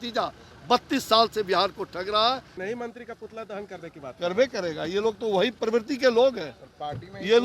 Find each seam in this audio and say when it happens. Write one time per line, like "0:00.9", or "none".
0:02.5